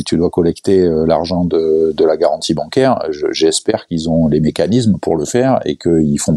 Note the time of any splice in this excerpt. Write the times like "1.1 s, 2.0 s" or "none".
none